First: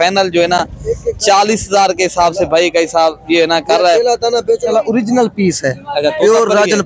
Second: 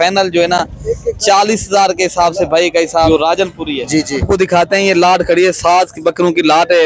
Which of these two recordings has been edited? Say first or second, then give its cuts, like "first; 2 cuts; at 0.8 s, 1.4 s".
second; 2 cuts; at 3.1 s, 4.2 s